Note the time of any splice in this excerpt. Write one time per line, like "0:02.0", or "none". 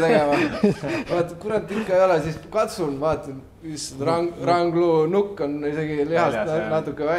none